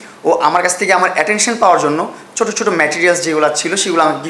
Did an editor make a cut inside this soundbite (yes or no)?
no